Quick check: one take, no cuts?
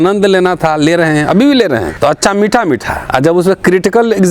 no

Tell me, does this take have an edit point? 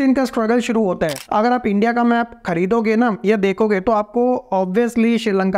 yes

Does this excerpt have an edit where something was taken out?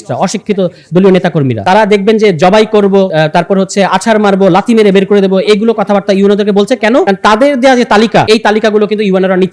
yes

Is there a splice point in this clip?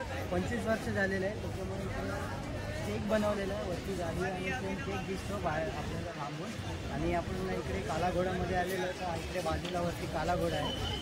no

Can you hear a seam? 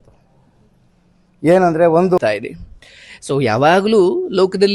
yes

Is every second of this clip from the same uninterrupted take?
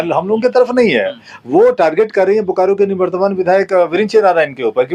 yes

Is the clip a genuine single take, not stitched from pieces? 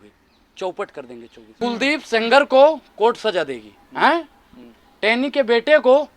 no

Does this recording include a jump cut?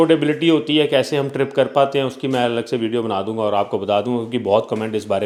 no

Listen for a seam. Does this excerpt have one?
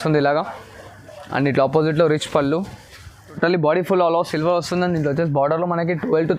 yes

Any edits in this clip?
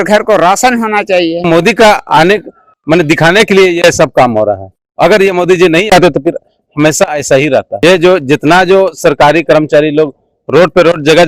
yes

